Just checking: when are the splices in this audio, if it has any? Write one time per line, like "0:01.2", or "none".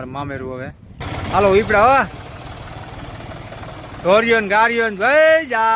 0:01.0